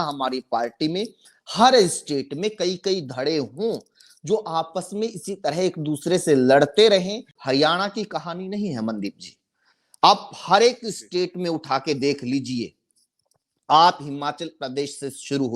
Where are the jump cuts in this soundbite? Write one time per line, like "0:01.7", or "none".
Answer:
0:07.3

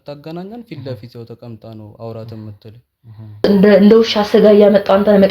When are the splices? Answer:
0:03.4

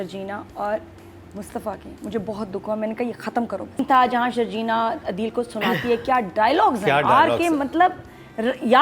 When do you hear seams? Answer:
0:03.8

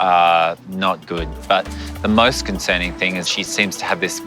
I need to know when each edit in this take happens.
0:01.3

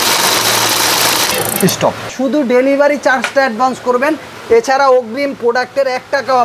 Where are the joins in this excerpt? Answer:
0:02.1

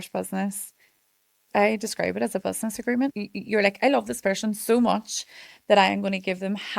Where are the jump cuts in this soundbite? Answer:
0:01.4
0:03.1

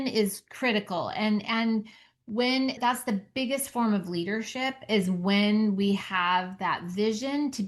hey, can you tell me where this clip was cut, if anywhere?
0:02.8

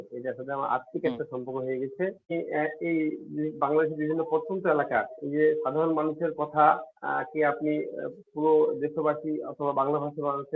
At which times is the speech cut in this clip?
0:02.3

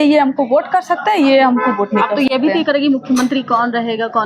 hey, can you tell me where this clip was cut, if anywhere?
none

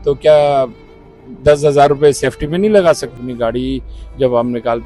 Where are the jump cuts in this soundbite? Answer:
0:03.1

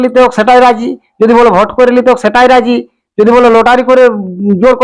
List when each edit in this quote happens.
none

